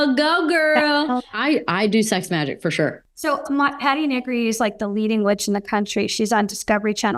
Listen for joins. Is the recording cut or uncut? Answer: cut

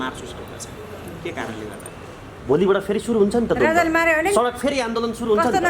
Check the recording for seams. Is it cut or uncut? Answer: cut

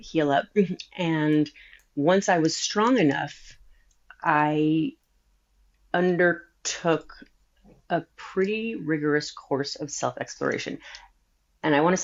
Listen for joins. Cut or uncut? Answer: uncut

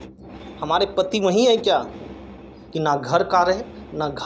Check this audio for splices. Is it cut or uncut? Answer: cut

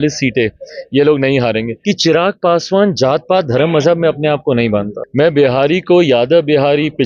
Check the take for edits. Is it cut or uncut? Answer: cut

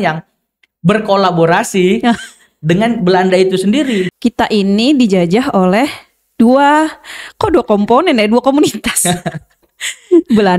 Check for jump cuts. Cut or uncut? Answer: cut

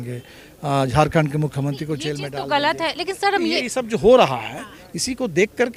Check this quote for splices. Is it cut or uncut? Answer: uncut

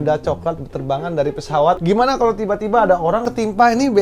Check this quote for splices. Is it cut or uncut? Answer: cut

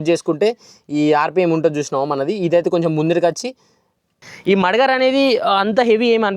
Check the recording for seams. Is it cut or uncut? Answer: cut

